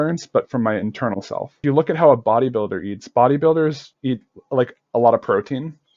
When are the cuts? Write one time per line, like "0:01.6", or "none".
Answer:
0:01.6